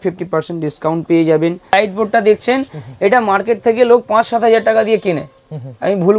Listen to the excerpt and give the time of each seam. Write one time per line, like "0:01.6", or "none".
0:01.7